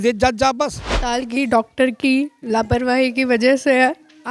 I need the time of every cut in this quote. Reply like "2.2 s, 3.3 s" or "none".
1.2 s